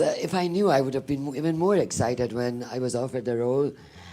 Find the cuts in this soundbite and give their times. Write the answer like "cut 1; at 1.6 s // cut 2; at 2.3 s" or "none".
cut 1; at 3.1 s